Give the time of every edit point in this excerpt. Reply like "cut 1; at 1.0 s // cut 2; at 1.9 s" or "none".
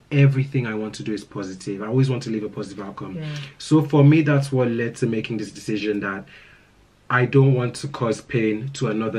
none